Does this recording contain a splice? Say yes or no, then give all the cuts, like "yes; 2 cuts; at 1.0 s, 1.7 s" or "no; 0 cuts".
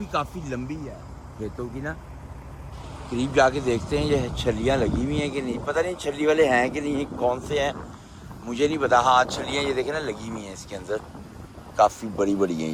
no; 0 cuts